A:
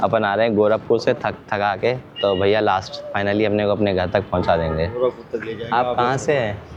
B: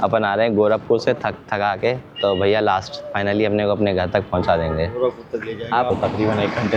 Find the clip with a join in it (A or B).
B